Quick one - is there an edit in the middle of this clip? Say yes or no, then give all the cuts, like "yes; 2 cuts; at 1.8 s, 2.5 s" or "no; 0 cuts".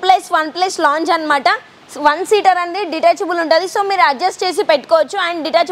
no; 0 cuts